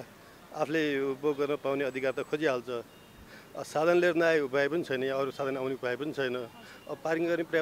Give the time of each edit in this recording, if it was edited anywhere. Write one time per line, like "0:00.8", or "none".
none